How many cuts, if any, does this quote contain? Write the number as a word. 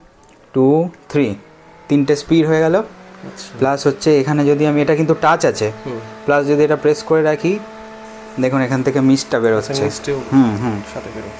zero